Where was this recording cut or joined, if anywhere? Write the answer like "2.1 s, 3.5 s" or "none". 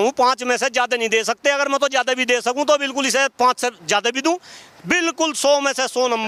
none